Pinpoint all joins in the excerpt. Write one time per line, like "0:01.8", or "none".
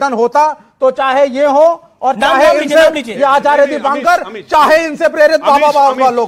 none